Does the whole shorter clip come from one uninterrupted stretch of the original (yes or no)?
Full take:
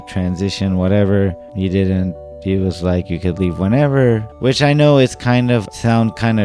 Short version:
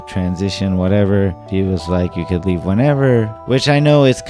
no